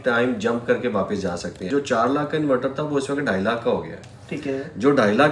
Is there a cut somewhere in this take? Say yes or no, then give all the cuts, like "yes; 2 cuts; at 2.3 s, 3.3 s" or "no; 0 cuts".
yes; 1 cut; at 1.7 s